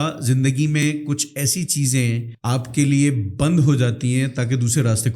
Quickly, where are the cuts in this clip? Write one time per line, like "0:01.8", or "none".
0:02.3